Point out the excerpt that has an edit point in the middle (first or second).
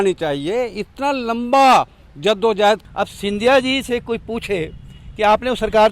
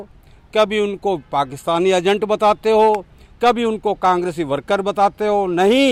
first